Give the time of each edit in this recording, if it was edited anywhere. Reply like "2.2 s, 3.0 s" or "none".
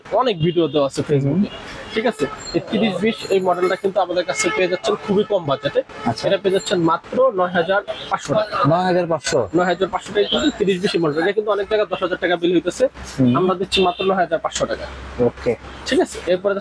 none